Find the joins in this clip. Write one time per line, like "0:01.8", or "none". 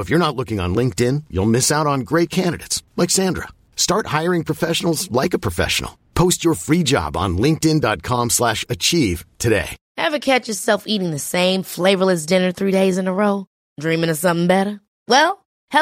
0:09.8